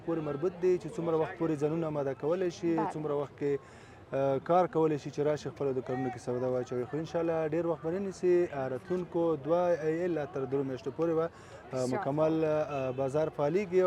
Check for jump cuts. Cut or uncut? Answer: uncut